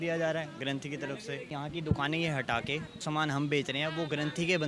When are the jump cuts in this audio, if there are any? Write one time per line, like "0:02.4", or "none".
0:01.6
0:03.0